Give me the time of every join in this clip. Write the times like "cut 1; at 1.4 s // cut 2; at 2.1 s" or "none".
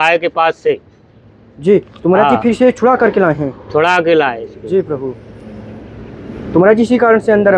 none